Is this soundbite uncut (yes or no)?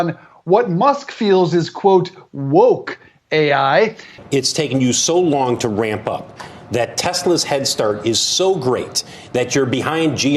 no